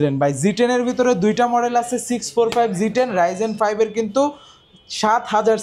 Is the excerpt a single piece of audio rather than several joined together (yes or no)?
yes